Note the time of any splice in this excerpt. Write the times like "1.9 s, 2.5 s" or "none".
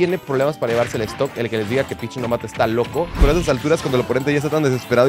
3.2 s